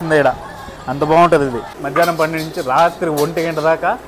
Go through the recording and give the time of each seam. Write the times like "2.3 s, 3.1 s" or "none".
1.7 s